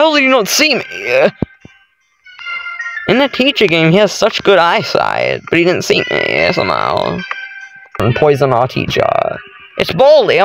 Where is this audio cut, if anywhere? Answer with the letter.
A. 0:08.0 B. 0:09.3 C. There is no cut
A